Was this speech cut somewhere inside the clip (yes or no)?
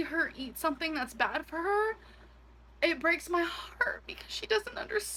no